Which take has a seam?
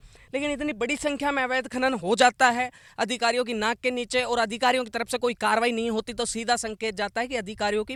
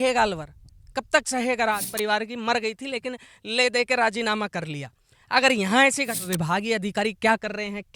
second; 2 cuts; at 1.9 s, 6.2 s

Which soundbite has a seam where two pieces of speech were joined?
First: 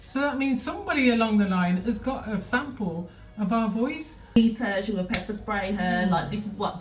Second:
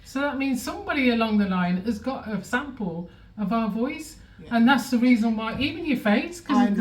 first; 1 cut; at 4.4 s

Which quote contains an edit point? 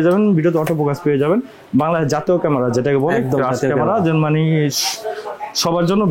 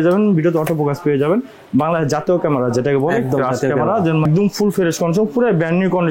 second; 1 cut; at 4.3 s

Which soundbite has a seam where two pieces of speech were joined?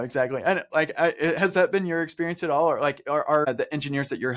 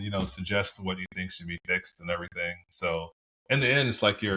first; 1 cut; at 3.5 s

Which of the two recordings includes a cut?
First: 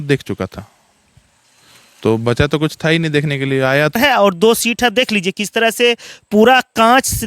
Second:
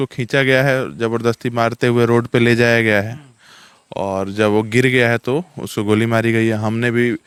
first; 1 cut; at 3.9 s

